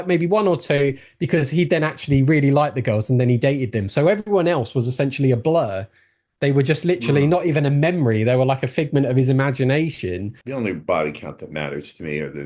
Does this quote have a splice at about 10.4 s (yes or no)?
yes